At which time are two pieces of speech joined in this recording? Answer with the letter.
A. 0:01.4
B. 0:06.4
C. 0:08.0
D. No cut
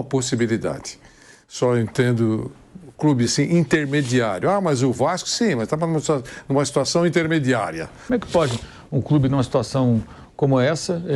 C